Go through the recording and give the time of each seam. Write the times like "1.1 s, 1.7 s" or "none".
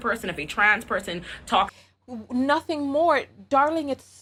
none